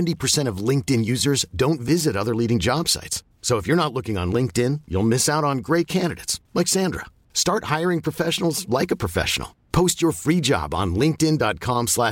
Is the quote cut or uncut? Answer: uncut